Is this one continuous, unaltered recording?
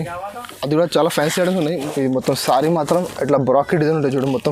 no; 1 cut; at 1.8 s

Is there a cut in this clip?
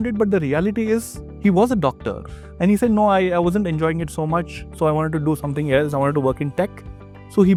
no; 0 cuts

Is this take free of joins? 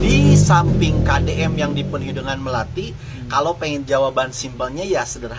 yes; 0 cuts

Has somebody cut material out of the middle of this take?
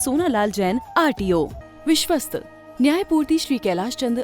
yes; 1 cut; at 1.6 s

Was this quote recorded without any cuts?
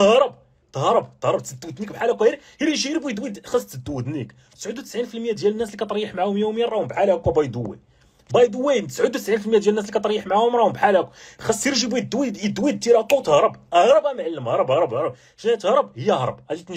yes; 0 cuts

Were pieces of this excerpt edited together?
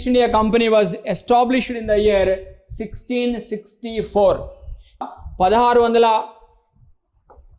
yes; 1 cut; at 5.1 s

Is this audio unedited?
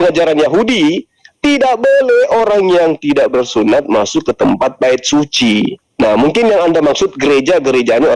yes; 0 cuts

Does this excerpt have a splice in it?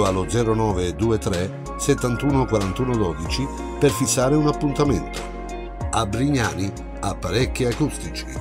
no; 0 cuts

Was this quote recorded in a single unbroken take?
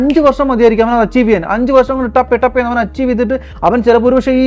yes; 0 cuts

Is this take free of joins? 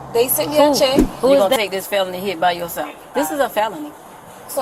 no; 1 cut; at 1.5 s

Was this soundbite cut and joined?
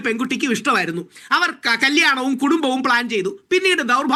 no; 0 cuts

